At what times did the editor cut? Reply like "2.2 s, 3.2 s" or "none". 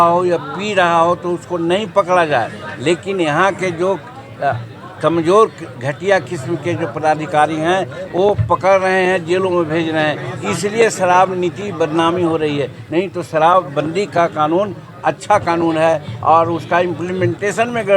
none